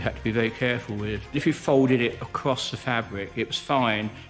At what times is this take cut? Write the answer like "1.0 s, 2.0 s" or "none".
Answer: 1.4 s